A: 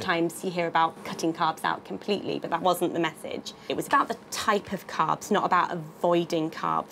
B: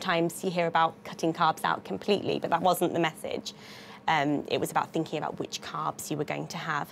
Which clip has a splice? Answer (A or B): A